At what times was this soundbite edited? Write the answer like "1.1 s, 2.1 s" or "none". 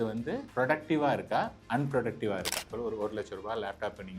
2.7 s

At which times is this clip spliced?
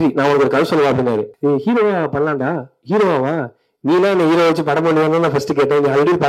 1.3 s

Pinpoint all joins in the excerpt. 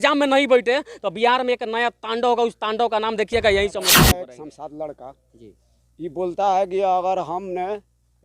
4.2 s

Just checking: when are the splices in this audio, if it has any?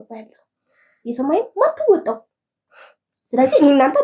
none

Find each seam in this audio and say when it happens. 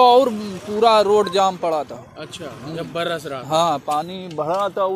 none

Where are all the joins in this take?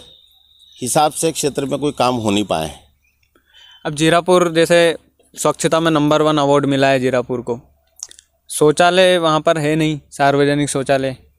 none

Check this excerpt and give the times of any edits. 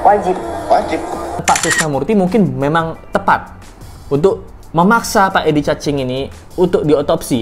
1.4 s

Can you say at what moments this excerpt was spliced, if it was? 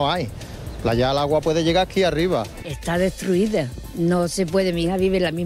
2.5 s

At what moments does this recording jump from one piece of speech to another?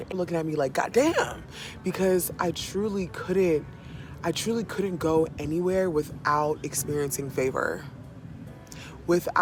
none

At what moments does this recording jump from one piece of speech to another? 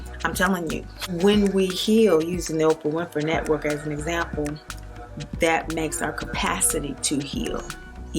1.1 s

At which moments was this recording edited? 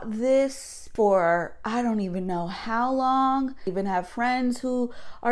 3.7 s

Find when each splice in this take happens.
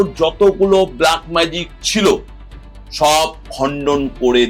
none

